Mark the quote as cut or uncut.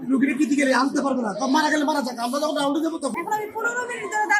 cut